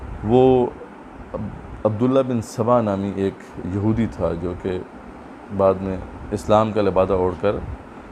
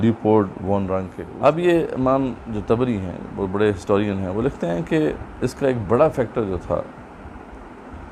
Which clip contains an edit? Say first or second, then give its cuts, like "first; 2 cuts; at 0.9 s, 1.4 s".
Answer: second; 1 cut; at 1.2 s